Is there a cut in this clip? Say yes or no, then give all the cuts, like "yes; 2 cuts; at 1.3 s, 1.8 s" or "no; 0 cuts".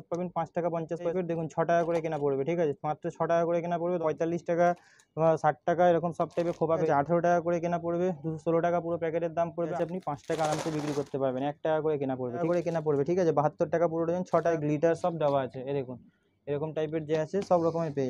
yes; 6 cuts; at 1.1 s, 4.0 s, 6.9 s, 9.7 s, 12.4 s, 14.5 s